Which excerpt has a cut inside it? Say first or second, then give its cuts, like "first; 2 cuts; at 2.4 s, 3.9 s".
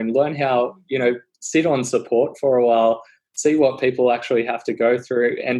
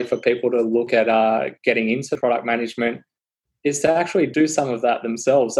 second; 3 cuts; at 0.9 s, 2.2 s, 4.3 s